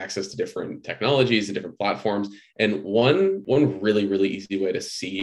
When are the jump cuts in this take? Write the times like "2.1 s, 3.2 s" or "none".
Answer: 3.4 s